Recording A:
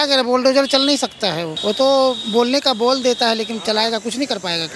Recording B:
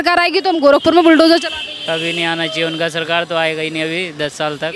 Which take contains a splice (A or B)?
A